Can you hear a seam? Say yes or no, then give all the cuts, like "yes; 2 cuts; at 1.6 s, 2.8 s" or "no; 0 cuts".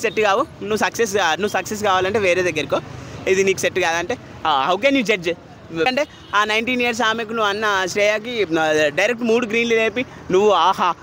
yes; 1 cut; at 5.9 s